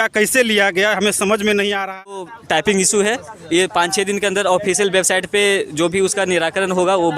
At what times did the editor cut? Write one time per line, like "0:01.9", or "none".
0:02.3